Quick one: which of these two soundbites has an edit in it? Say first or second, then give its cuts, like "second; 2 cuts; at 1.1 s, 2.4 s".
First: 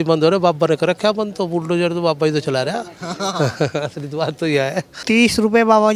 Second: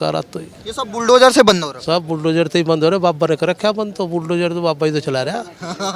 first; 1 cut; at 4.9 s